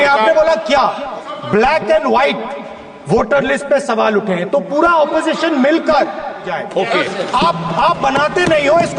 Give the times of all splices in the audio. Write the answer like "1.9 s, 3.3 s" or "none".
1.0 s, 6.6 s